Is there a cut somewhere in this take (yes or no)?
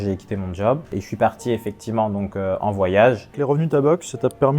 yes